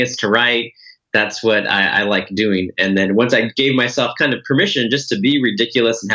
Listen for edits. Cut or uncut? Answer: uncut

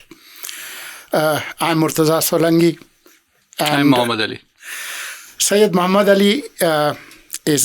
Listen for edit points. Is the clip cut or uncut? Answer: uncut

